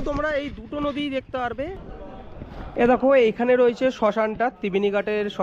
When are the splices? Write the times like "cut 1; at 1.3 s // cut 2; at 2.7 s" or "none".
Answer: cut 1; at 1.8 s